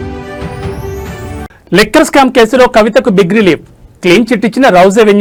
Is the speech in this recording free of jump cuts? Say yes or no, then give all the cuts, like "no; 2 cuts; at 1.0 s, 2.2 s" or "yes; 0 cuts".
yes; 0 cuts